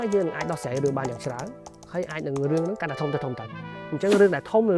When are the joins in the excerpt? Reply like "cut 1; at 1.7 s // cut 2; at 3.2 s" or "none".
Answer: none